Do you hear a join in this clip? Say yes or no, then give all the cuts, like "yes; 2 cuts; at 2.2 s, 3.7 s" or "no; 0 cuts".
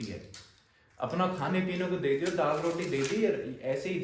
no; 0 cuts